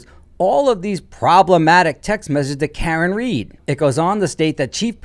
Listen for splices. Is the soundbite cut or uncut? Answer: uncut